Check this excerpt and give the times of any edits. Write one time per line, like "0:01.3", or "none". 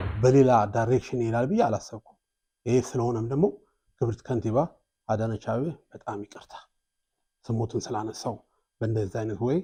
none